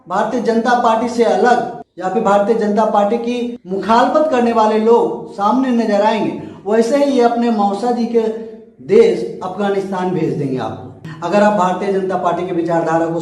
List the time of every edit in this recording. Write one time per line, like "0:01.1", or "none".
0:11.1